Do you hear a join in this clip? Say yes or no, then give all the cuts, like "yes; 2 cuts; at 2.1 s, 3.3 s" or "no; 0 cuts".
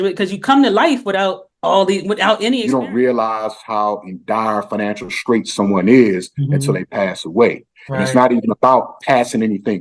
yes; 1 cut; at 2.6 s